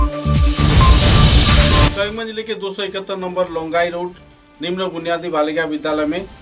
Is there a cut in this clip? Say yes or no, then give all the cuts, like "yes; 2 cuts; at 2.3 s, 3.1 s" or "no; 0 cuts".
yes; 1 cut; at 1.9 s